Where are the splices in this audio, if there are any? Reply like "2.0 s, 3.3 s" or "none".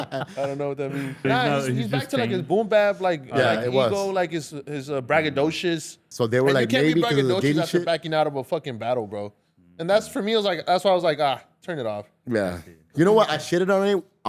1.2 s, 6.0 s